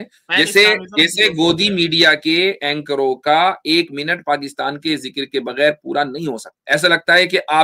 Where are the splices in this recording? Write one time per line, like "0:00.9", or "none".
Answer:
0:06.5